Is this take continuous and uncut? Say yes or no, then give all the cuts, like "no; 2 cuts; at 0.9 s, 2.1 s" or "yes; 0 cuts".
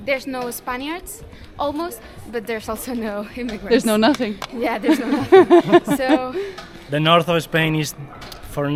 yes; 0 cuts